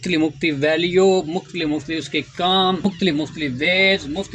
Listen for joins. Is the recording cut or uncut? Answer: cut